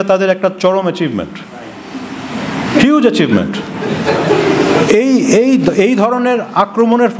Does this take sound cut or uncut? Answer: uncut